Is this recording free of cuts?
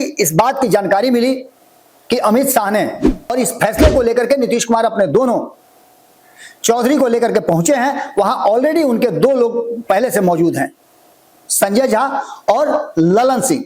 no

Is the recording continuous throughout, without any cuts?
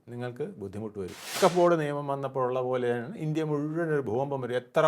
no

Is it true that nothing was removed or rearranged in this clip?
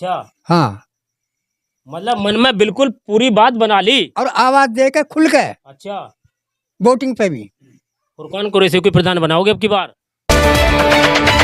no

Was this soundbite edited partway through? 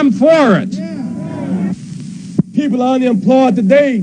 yes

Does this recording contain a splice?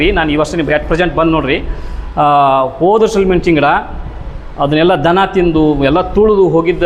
no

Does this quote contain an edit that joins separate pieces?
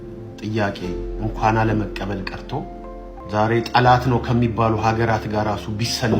yes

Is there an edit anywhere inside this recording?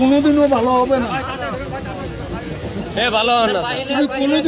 no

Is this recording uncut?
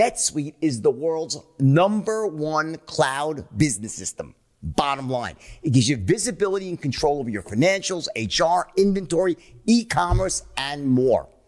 yes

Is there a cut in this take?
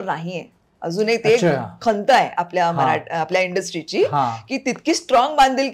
no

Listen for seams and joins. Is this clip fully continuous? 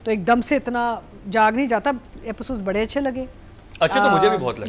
no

